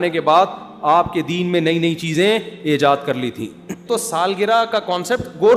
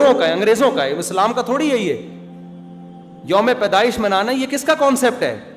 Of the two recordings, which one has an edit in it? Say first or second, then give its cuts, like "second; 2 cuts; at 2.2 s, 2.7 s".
first; 1 cut; at 3.8 s